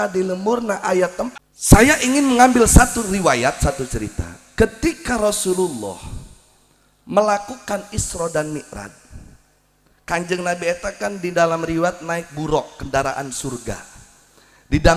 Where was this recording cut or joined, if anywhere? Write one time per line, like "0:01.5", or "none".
0:01.3